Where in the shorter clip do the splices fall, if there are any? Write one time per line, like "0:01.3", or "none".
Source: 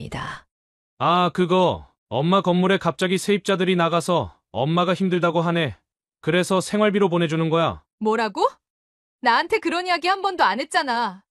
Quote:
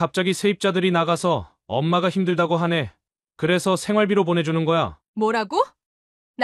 none